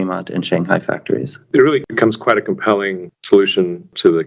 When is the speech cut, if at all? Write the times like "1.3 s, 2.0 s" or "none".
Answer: 1.4 s

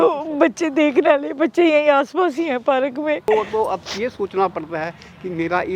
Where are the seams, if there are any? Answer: 3.3 s

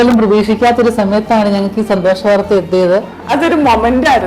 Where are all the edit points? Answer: 3.2 s

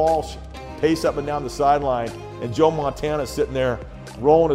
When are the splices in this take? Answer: none

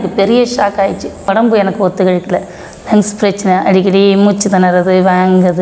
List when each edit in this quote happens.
1.3 s

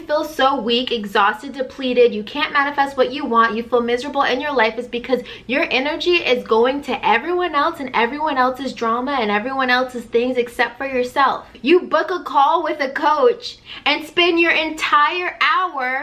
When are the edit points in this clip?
11.5 s

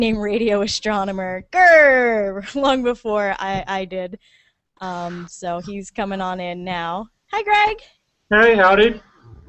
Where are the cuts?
none

